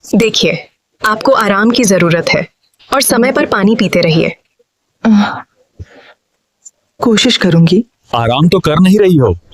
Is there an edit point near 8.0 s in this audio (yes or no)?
yes